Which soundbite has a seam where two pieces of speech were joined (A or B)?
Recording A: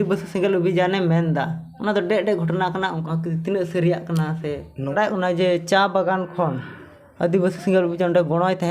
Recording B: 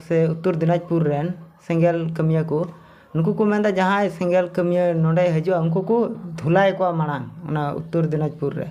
A